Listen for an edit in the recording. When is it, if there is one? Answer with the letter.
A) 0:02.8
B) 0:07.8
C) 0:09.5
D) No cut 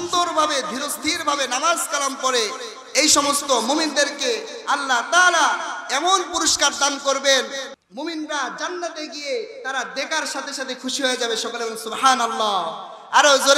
B